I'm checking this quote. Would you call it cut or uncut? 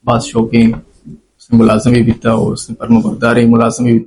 uncut